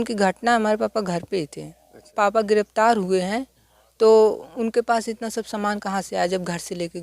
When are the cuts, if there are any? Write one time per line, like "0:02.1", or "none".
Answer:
0:02.0